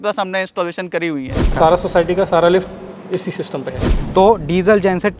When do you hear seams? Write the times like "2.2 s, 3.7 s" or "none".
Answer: 1.5 s, 3.8 s